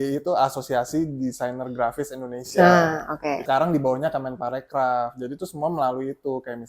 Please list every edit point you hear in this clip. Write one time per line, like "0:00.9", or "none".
0:03.4

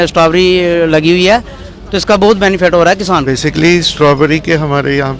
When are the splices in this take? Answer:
0:03.2

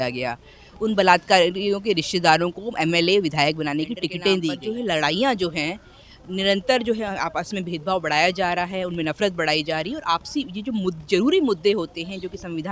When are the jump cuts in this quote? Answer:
0:04.6

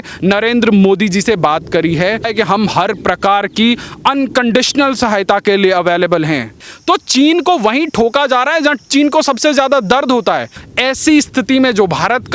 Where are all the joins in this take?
0:02.3
0:06.7
0:10.7

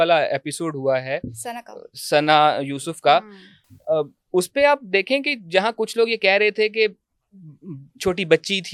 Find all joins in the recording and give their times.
none

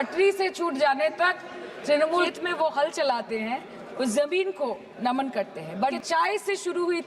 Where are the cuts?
0:02.3
0:06.0

